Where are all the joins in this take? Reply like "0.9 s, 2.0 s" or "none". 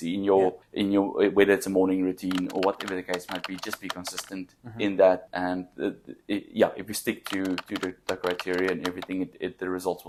none